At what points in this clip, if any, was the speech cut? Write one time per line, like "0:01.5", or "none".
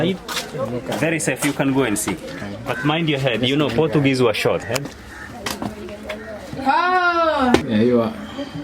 0:05.0
0:07.6